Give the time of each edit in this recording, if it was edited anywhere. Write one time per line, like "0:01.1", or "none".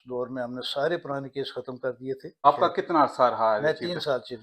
0:02.3